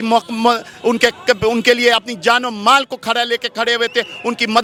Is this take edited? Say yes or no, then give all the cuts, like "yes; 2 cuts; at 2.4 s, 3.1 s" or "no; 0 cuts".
no; 0 cuts